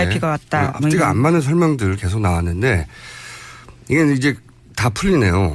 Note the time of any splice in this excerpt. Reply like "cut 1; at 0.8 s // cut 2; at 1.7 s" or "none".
cut 1; at 4.3 s